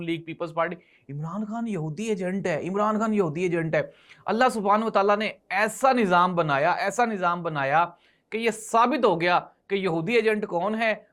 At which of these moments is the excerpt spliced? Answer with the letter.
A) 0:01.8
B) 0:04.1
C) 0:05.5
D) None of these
D